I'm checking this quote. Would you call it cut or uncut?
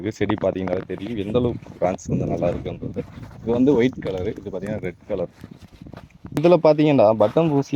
cut